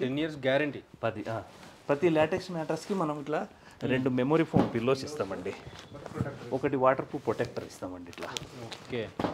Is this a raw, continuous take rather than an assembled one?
yes; 0 cuts

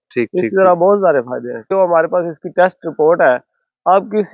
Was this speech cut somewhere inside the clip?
yes; 1 cut; at 1.7 s

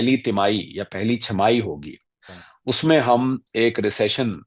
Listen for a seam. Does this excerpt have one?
no; 0 cuts

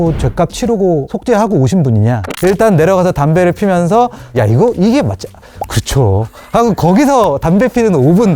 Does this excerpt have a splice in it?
yes; 2 cuts; at 1.1 s, 2.3 s

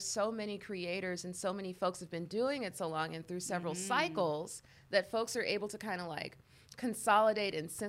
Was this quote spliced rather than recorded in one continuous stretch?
no; 0 cuts

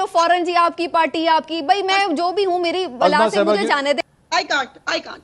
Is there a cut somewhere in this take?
yes; 1 cut; at 4.0 s

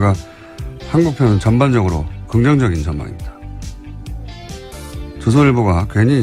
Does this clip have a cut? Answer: yes; 1 cut; at 4.7 s

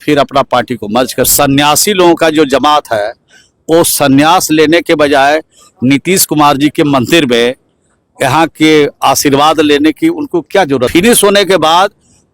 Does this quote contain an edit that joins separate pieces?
yes; 2 cuts; at 1.3 s, 10.9 s

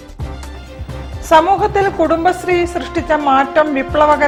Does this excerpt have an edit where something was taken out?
no; 0 cuts

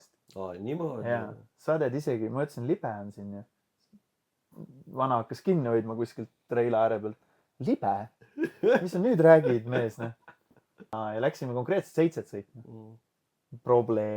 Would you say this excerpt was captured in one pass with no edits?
no; 1 cut; at 10.9 s

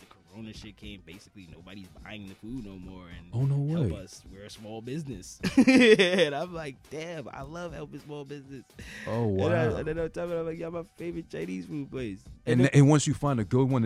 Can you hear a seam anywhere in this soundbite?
no; 0 cuts

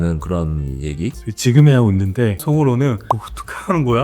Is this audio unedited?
no; 3 cuts; at 1.3 s, 2.4 s, 3.0 s

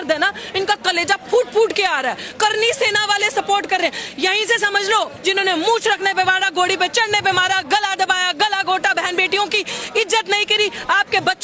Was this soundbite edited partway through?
yes; 1 cut; at 5.1 s

